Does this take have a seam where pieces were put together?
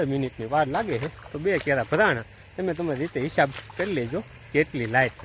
no; 0 cuts

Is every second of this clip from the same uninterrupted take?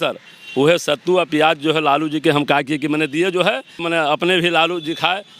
no; 1 cut; at 3.8 s

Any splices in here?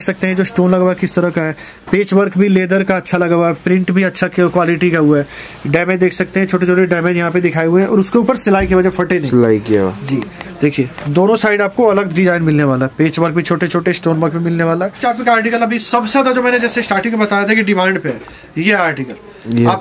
yes; 1 cut; at 15.0 s

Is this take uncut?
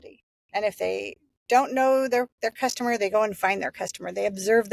yes; 0 cuts

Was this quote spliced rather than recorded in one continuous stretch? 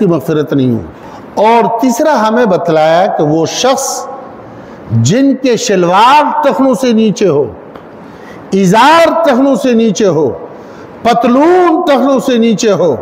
no; 0 cuts

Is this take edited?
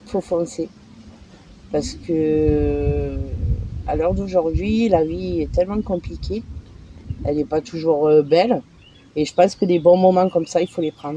no; 0 cuts

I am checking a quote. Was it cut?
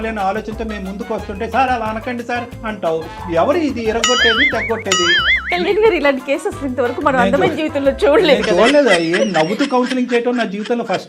no; 0 cuts

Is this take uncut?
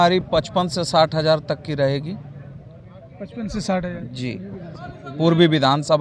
yes; 0 cuts

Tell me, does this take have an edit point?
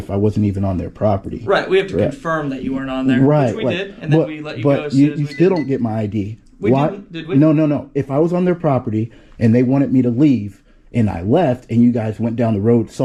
no; 0 cuts

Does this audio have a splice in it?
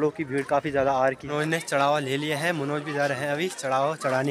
yes; 1 cut; at 1.2 s

